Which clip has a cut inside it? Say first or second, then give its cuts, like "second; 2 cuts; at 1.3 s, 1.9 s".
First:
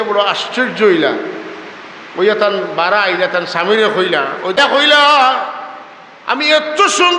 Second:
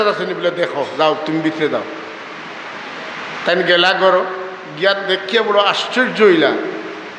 first; 1 cut; at 4.6 s